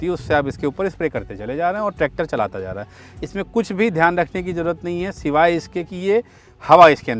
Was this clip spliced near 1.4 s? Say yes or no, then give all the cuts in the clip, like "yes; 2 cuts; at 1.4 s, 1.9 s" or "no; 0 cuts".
no; 0 cuts